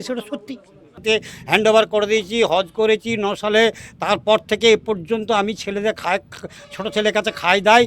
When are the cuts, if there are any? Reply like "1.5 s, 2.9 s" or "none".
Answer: 1.0 s